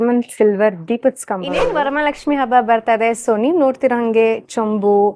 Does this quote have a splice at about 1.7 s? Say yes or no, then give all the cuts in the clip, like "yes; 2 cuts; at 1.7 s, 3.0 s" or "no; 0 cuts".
yes; 1 cut; at 1.7 s